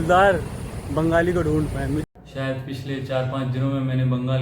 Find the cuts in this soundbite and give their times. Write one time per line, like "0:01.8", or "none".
0:02.0